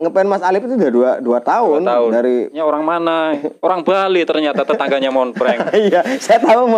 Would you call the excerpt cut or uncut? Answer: cut